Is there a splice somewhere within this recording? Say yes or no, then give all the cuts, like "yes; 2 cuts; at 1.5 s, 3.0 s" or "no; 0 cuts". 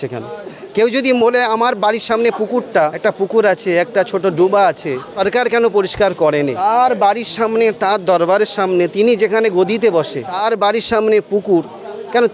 yes; 4 cuts; at 3.0 s, 5.1 s, 6.6 s, 10.2 s